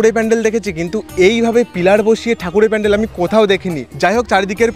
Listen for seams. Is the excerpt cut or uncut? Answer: uncut